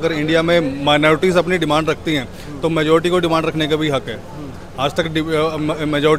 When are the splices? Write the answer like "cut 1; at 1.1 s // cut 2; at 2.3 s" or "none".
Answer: none